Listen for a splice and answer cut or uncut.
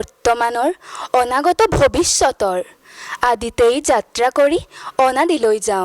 uncut